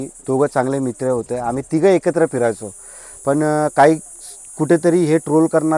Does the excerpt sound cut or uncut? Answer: uncut